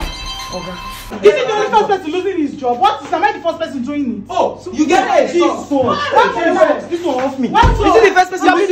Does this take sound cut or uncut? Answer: cut